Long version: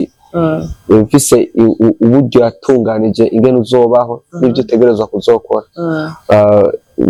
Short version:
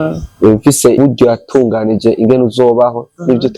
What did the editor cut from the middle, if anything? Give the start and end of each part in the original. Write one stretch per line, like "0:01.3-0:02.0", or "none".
0:01.5-0:02.1